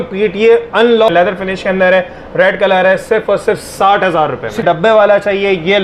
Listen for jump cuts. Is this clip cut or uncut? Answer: cut